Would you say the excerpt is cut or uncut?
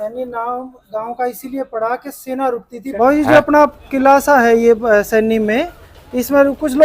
cut